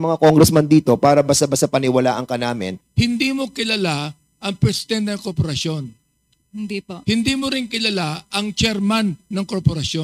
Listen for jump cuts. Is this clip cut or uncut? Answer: cut